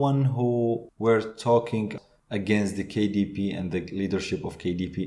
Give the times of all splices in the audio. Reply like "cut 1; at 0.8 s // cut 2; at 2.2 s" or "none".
cut 1; at 0.9 s // cut 2; at 1.9 s

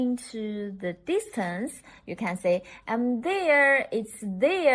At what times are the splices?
none

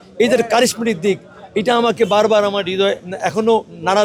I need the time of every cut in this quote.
none

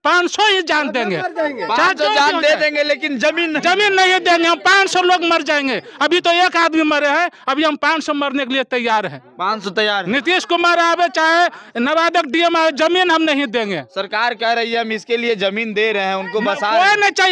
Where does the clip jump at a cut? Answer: none

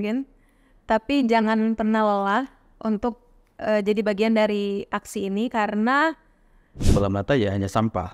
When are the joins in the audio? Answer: cut 1; at 6.8 s

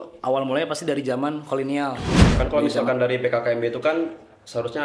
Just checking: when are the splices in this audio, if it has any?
cut 1; at 2.3 s

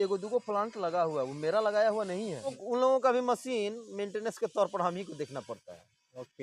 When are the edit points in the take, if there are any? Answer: cut 1; at 2.6 s

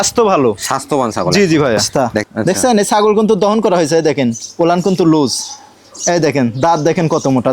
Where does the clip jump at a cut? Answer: cut 1; at 1.9 s

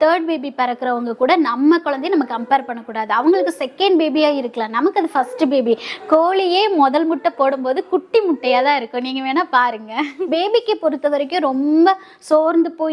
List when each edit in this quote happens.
cut 1; at 10.1 s

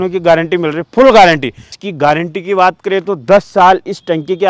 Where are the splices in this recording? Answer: cut 1; at 1.7 s

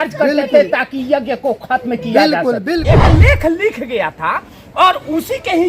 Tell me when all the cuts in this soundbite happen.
cut 1; at 3.0 s

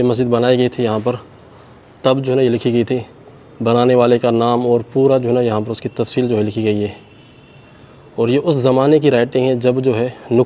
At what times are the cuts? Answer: none

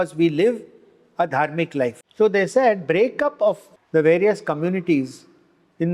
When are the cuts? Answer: cut 1; at 2.0 s // cut 2; at 3.7 s

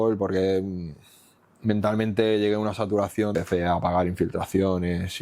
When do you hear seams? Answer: cut 1; at 3.3 s

